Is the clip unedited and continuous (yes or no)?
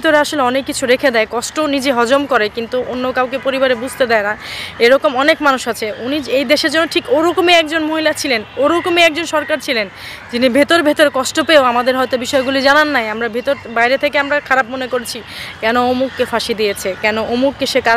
yes